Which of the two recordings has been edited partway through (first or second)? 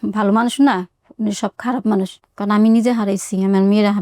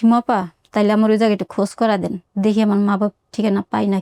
first